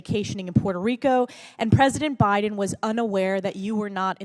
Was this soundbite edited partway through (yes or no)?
no